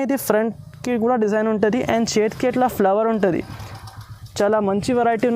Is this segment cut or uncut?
uncut